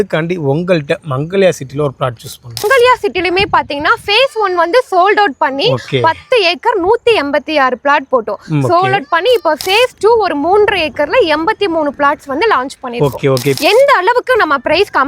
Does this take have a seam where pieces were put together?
yes; 2 cuts; at 2.6 s, 13.6 s

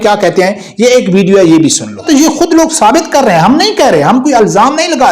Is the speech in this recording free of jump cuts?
no; 1 cut; at 2.1 s

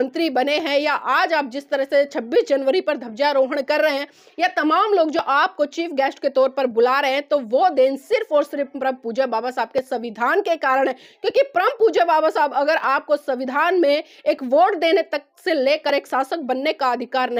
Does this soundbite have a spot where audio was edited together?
no; 0 cuts

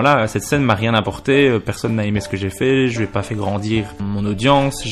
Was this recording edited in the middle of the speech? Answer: yes; 1 cut; at 4.0 s

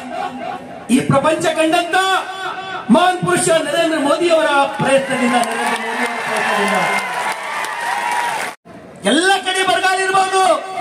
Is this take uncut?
no; 1 cut; at 8.6 s

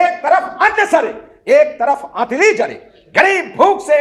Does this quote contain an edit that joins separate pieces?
no; 0 cuts

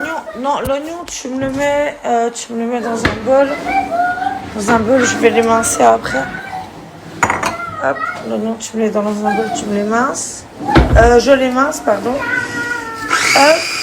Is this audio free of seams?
no; 1 cut; at 2.1 s

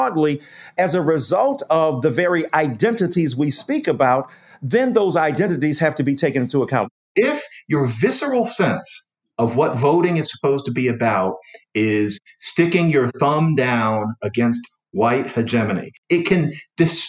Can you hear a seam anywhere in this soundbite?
yes; 2 cuts; at 6.9 s, 15.9 s

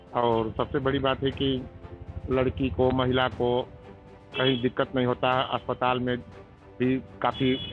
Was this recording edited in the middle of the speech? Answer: no; 0 cuts

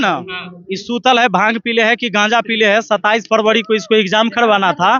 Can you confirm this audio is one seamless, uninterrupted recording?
yes; 0 cuts

